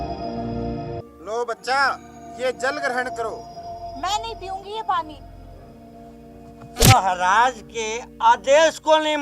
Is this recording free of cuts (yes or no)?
no